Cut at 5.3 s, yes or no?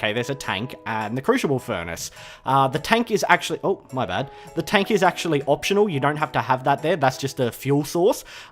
no